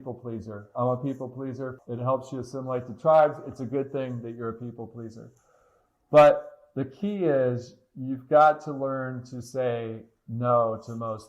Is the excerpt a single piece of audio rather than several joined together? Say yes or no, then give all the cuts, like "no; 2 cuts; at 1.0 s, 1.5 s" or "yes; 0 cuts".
no; 1 cut; at 1.7 s